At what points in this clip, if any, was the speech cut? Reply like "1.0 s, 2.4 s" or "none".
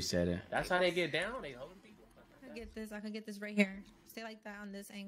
2.5 s

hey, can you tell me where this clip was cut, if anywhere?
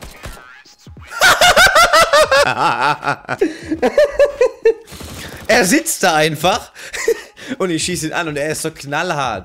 none

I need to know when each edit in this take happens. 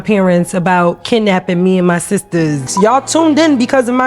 2.6 s

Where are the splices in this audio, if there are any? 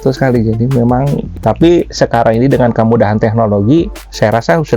1.3 s

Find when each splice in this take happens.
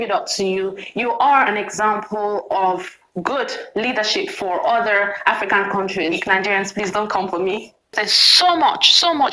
7.9 s

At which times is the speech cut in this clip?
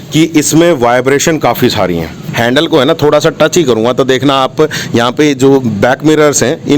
2.2 s

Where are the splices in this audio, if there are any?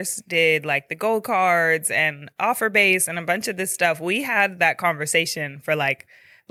none

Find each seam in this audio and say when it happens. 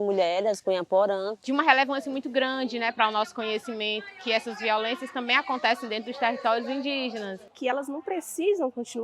1.4 s, 7.5 s

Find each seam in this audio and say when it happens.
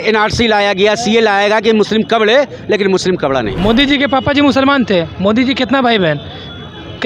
3.5 s

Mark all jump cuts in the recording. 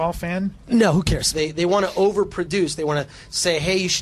1.3 s

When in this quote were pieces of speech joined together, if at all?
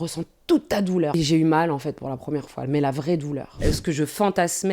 1.1 s, 3.6 s

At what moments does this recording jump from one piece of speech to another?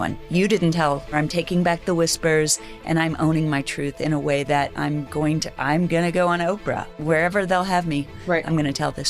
1.1 s, 7.0 s

